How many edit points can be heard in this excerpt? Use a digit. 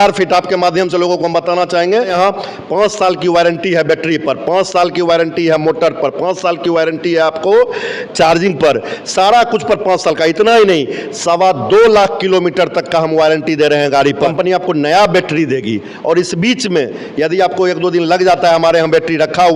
2